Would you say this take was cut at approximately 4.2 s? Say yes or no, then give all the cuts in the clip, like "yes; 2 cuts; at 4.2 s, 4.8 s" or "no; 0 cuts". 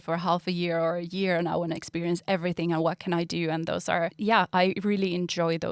yes; 1 cut; at 4.2 s